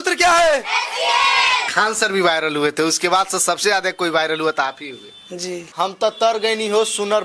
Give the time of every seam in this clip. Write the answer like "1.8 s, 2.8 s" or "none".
1.7 s, 5.6 s